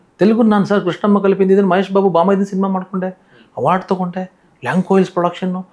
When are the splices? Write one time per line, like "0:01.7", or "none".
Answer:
none